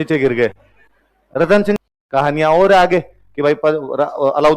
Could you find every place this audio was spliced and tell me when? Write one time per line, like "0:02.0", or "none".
0:01.8